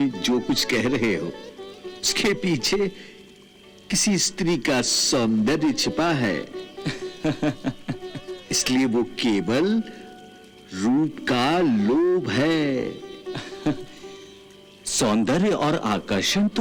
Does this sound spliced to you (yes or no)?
no